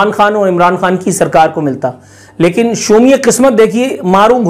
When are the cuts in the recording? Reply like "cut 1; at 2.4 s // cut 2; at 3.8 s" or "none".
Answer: none